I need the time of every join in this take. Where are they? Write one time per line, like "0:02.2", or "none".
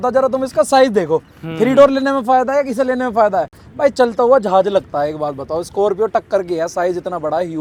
none